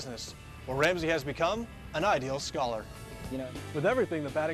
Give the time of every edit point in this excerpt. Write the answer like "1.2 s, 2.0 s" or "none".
3.4 s

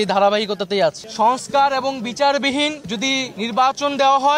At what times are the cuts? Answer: 1.0 s

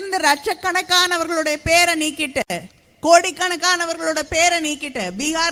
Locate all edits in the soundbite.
none

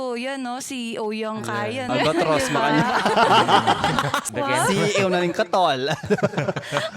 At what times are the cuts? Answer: 1.9 s, 4.2 s

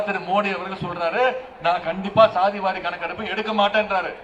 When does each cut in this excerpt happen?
none

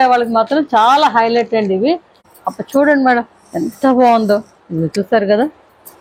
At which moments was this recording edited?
2.3 s

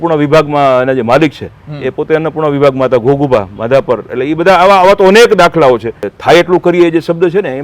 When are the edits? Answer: 6.1 s

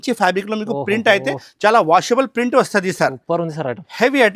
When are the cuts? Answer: none

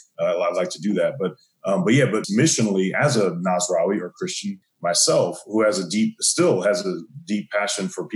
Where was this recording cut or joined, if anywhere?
2.2 s, 4.6 s

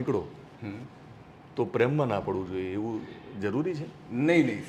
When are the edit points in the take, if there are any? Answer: none

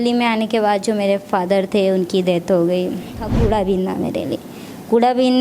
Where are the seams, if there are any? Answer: 3.3 s

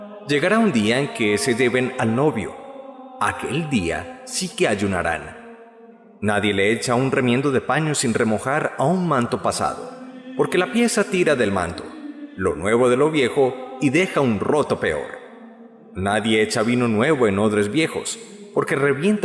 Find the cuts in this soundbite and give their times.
none

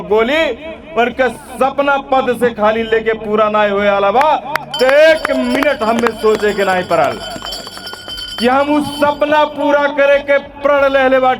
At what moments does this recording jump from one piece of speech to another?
none

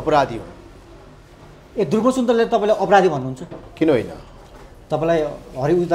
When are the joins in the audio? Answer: none

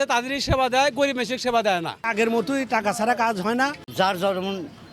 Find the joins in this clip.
2.1 s, 3.8 s

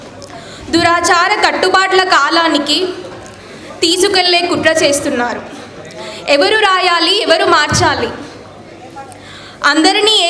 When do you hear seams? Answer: none

